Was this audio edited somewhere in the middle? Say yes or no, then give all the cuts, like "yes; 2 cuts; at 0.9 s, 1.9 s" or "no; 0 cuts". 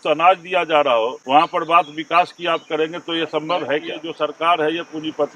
yes; 2 cuts; at 1.2 s, 4.0 s